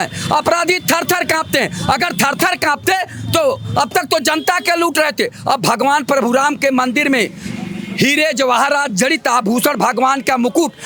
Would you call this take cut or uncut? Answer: uncut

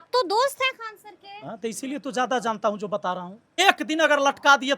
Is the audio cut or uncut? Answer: cut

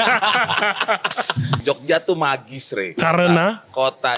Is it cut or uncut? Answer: cut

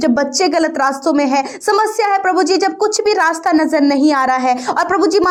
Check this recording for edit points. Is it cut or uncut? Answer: uncut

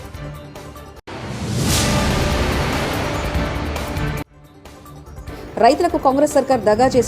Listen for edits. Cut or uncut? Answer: cut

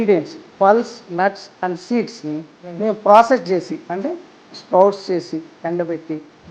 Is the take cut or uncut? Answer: uncut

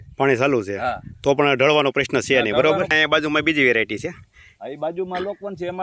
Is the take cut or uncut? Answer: cut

